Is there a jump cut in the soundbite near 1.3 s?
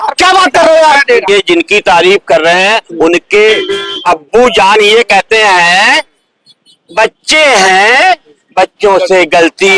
yes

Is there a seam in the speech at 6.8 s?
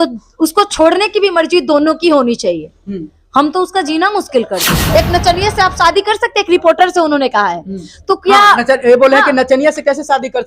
no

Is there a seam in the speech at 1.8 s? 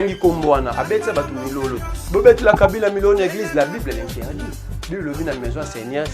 no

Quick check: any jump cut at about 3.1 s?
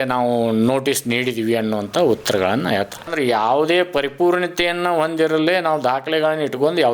yes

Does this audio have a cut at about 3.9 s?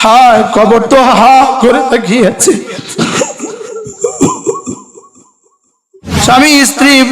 no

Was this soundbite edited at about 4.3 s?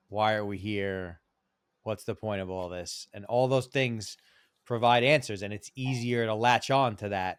no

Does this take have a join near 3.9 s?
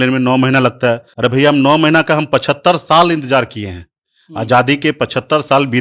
no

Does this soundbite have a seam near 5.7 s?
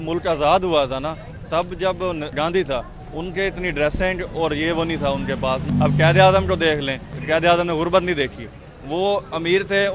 yes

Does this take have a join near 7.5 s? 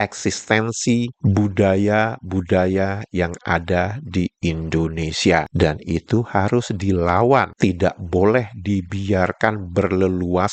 no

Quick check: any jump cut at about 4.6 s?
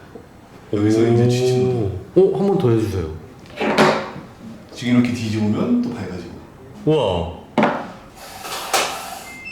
no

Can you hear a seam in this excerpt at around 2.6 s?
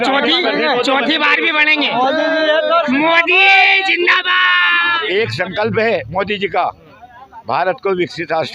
no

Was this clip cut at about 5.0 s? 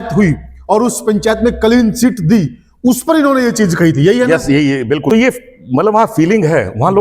yes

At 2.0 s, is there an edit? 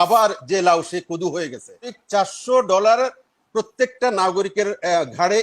yes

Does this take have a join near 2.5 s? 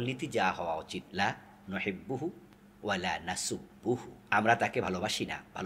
no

